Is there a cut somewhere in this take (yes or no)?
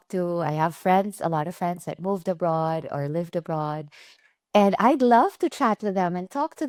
no